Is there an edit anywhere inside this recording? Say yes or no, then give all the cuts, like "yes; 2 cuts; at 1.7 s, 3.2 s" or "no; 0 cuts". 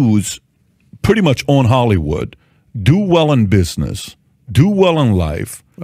no; 0 cuts